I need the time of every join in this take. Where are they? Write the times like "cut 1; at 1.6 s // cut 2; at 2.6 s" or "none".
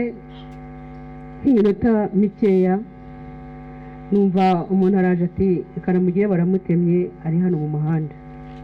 none

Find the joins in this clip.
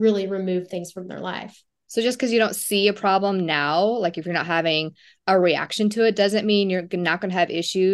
cut 1; at 1.8 s

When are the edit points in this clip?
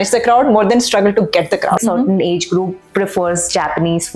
cut 1; at 1.8 s

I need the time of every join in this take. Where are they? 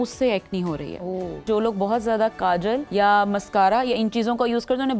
cut 1; at 1.4 s // cut 2; at 2.9 s

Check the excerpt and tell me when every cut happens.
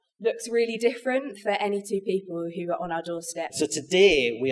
cut 1; at 3.5 s

